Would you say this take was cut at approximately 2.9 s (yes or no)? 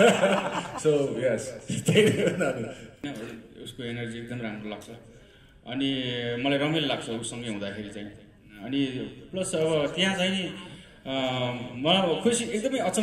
yes